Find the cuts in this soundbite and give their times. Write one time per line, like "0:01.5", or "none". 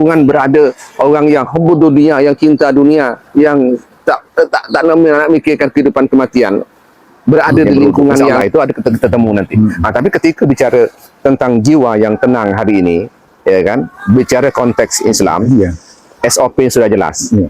0:08.4